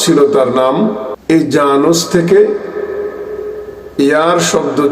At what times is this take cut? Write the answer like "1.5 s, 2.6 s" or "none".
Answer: 1.1 s